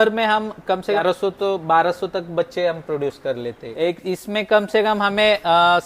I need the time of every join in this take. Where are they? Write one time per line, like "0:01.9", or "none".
0:01.0
0:03.6